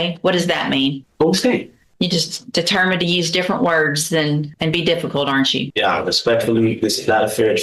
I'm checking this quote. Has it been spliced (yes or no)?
yes